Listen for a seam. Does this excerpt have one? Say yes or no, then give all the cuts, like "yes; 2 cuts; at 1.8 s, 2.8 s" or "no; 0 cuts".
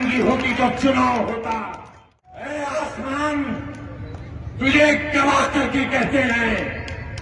yes; 1 cut; at 2.3 s